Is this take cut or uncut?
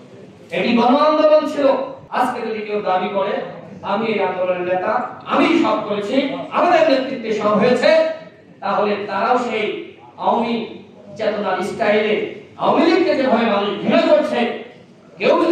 cut